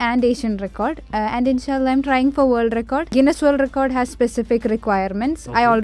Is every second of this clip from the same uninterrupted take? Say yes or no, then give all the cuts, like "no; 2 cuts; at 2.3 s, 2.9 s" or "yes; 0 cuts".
no; 2 cuts; at 1.0 s, 3.1 s